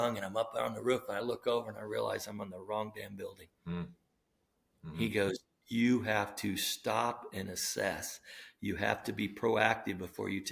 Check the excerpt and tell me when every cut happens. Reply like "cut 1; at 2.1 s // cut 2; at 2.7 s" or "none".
cut 1; at 3.5 s